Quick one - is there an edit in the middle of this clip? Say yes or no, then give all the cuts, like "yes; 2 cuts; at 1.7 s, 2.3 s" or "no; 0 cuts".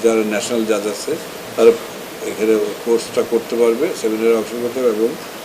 no; 0 cuts